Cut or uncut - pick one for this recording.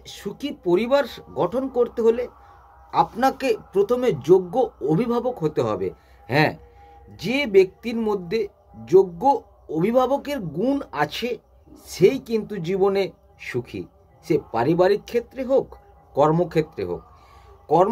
uncut